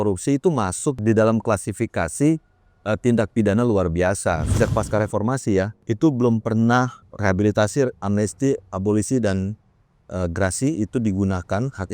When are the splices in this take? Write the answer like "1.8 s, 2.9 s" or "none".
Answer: 1.0 s, 4.5 s, 5.8 s, 7.0 s